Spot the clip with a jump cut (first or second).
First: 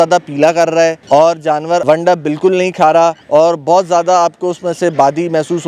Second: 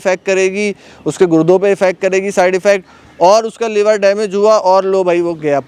first